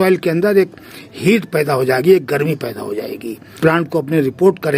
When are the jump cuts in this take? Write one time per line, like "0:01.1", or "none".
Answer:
0:03.4

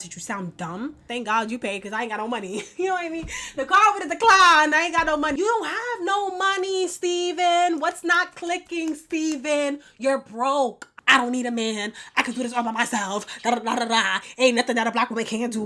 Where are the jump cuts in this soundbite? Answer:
0:01.0
0:05.3
0:10.8

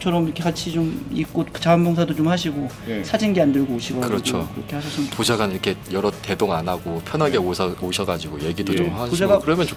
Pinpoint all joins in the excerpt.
none

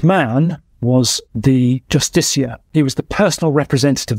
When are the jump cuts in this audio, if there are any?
0:02.6

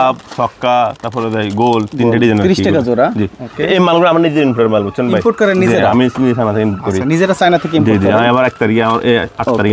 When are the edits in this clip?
none

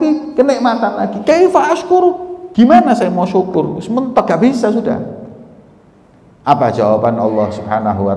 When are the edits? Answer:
0:02.3

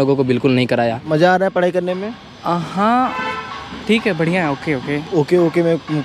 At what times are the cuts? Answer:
0:01.0
0:05.0

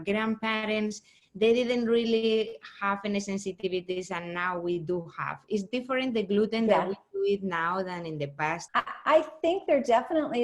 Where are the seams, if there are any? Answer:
0:08.6

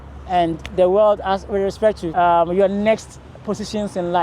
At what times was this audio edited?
0:02.0

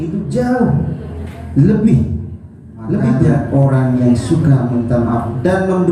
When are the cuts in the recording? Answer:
0:03.4

